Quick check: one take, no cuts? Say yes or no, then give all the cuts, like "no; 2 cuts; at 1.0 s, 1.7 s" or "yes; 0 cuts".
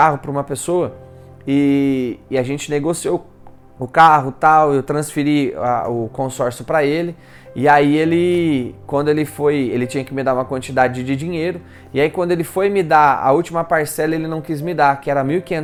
yes; 0 cuts